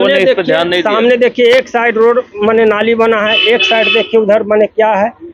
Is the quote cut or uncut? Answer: uncut